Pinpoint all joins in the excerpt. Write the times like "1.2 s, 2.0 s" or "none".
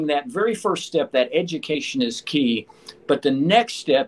none

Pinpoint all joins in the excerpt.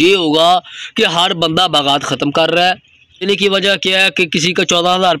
3.2 s

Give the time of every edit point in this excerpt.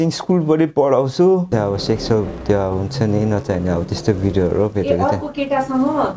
1.5 s

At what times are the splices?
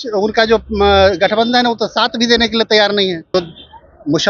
3.2 s

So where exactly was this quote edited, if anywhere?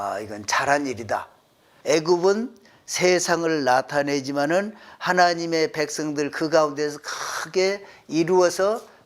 1.7 s

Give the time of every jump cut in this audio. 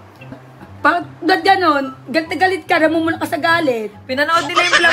none

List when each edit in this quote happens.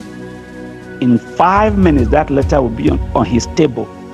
1.0 s

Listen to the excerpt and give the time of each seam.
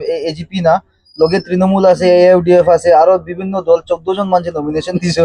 none

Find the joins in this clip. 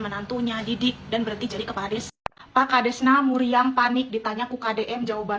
none

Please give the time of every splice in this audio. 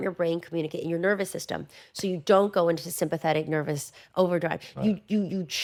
none

